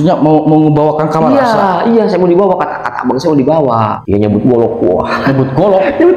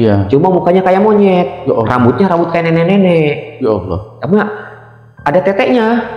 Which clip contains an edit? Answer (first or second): first